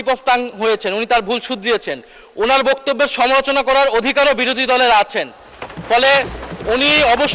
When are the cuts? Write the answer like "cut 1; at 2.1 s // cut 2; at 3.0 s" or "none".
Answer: none